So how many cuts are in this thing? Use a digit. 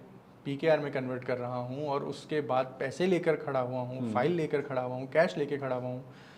0